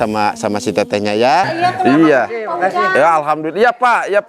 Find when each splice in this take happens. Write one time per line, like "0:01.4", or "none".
0:01.5